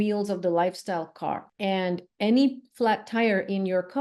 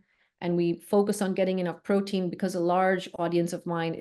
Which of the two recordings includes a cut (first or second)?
first